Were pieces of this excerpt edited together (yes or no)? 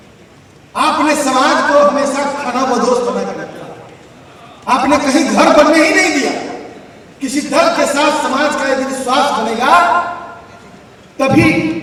no